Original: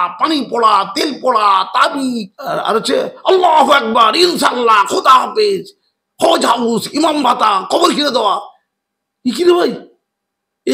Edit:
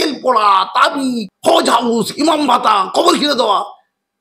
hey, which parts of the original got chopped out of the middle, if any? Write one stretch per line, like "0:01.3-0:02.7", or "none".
0:02.3-0:06.0